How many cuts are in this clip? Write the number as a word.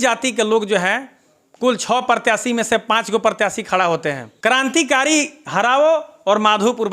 one